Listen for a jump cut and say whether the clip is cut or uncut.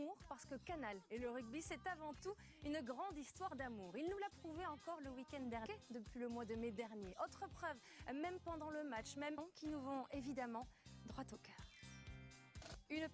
uncut